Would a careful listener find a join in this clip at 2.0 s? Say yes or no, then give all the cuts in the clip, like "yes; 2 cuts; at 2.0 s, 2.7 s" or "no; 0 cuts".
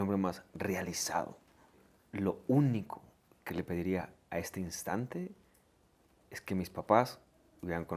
yes; 1 cut; at 2.0 s